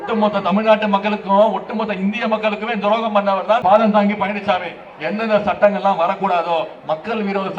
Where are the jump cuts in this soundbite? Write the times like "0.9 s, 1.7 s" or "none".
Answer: 3.6 s